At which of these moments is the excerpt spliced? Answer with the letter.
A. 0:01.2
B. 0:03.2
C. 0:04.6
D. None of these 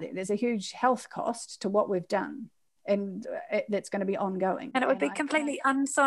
C